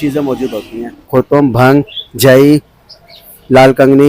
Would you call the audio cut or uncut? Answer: cut